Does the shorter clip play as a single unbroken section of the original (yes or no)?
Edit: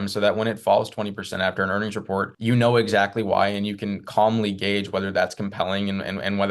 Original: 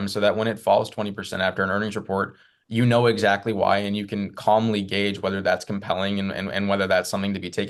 no